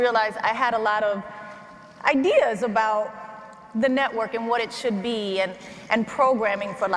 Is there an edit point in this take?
no; 0 cuts

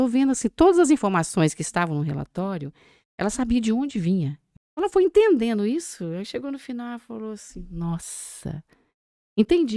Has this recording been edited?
yes; 1 cut; at 4.4 s

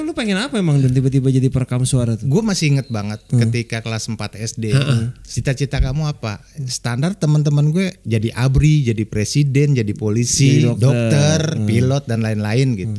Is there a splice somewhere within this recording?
yes; 2 cuts; at 2.2 s, 5.2 s

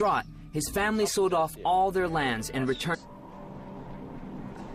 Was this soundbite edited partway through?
no; 0 cuts

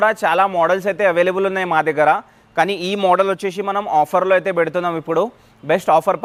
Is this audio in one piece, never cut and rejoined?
yes; 0 cuts

